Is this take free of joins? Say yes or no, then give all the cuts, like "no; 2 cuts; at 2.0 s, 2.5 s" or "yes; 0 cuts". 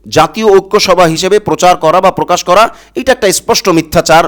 yes; 0 cuts